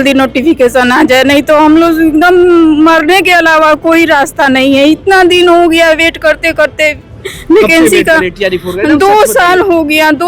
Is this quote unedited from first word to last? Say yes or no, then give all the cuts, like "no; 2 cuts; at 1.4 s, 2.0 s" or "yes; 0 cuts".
yes; 0 cuts